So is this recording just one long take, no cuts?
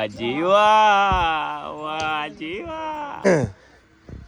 no; 1 cut; at 3.2 s

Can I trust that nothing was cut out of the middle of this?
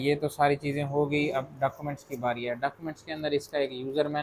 yes; 0 cuts

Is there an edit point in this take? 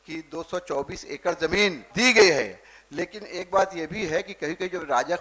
yes; 1 cut; at 1.8 s

